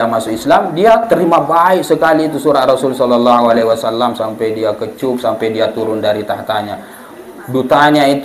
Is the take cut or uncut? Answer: uncut